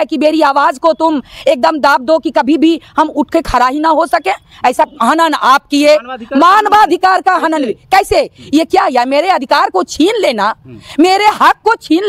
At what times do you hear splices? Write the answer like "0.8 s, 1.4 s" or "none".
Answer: 4.9 s